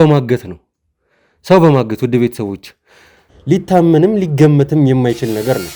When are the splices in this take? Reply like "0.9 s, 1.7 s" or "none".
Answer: 3.3 s